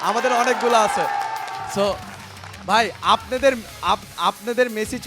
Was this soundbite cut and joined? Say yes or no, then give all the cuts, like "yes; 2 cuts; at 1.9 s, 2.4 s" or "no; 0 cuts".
no; 0 cuts